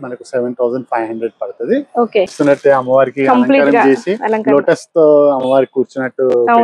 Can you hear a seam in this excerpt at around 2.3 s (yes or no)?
yes